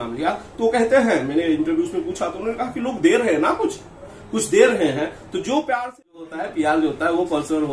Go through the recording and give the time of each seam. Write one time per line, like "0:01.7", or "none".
0:06.4